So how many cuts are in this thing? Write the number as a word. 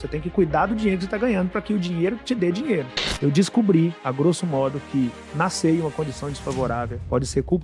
one